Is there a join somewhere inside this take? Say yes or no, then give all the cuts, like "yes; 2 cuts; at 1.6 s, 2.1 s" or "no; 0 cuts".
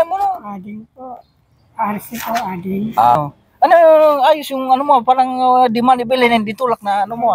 yes; 1 cut; at 3.2 s